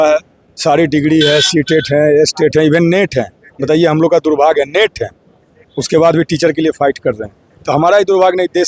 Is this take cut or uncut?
uncut